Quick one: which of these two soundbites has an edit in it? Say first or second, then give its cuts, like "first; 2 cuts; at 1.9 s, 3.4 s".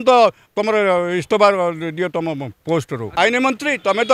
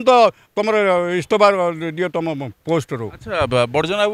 first; 1 cut; at 3.0 s